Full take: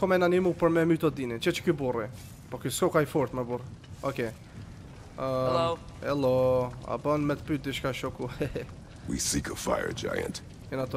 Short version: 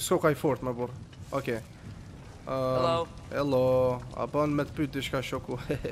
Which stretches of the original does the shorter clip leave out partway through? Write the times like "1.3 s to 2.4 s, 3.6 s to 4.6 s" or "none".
none